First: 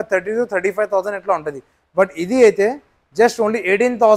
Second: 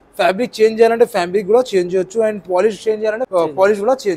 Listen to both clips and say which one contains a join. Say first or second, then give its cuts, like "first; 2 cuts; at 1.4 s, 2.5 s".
second; 1 cut; at 3.2 s